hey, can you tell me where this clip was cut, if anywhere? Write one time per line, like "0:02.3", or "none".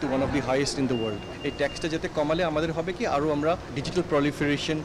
0:01.4
0:03.7